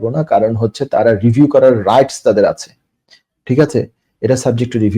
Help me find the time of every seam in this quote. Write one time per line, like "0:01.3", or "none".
none